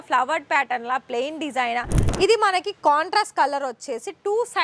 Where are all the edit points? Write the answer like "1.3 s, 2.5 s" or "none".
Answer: 2.0 s